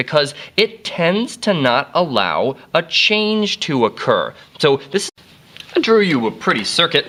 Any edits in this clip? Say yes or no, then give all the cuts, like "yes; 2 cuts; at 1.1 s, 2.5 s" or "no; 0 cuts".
no; 0 cuts